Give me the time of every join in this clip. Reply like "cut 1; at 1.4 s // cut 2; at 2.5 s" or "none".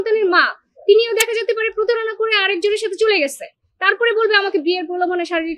none